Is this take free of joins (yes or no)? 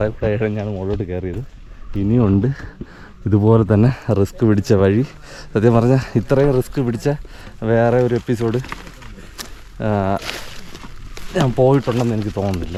yes